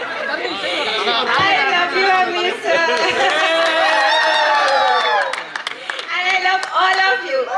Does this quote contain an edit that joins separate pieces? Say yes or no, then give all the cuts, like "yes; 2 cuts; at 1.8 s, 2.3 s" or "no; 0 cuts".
no; 0 cuts